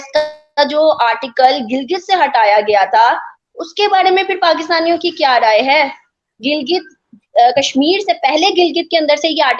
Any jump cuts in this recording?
no; 0 cuts

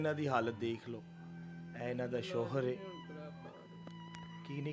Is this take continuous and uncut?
yes; 0 cuts

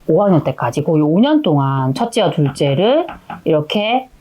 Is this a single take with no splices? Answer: yes; 0 cuts

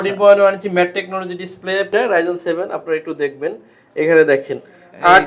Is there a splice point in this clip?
yes; 1 cut; at 1.9 s

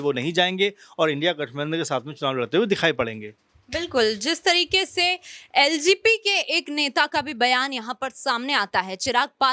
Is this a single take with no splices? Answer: yes; 0 cuts

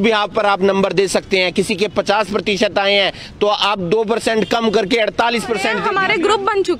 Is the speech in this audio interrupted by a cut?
yes; 1 cut; at 5.8 s

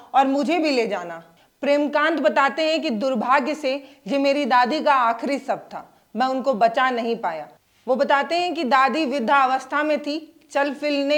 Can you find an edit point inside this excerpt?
no; 0 cuts

